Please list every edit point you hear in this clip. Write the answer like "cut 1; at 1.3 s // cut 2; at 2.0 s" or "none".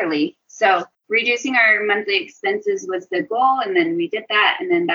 cut 1; at 0.9 s

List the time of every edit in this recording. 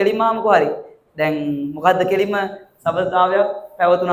none

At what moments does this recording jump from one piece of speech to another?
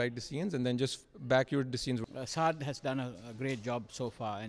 cut 1; at 2.0 s

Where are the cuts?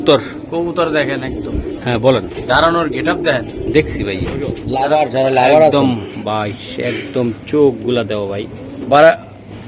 cut 1; at 4.6 s

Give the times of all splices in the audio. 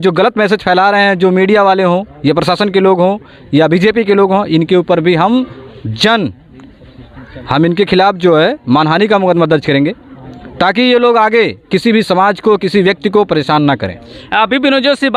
none

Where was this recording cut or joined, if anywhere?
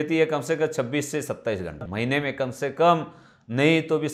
cut 1; at 1.8 s

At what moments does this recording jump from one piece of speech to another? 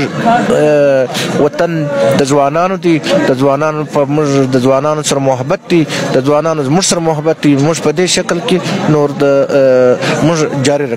none

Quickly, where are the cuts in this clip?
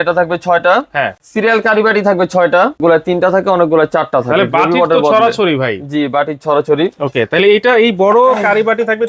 cut 1; at 1.2 s // cut 2; at 2.8 s

